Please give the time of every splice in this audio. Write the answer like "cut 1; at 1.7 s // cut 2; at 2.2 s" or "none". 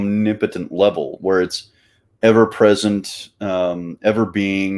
none